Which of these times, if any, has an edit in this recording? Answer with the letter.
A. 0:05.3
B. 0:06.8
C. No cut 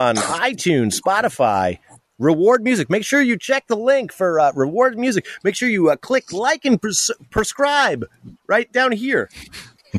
C